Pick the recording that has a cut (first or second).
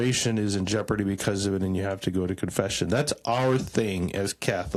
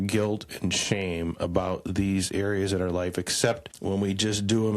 second